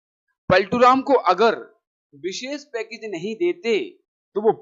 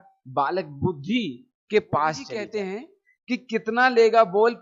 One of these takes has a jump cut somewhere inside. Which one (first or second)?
second